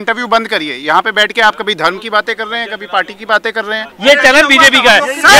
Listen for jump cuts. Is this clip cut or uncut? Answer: cut